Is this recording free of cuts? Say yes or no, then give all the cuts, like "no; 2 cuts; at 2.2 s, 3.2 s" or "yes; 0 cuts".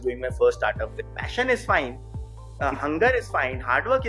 no; 1 cut; at 0.9 s